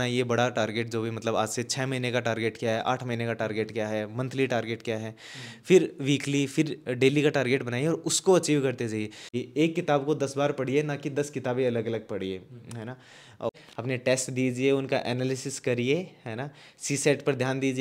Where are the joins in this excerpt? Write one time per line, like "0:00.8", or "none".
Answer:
0:09.2
0:13.5